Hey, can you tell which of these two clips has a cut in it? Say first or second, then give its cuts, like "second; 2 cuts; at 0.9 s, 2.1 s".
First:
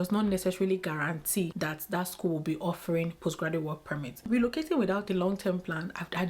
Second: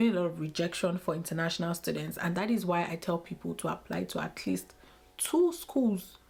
first; 2 cuts; at 1.5 s, 4.2 s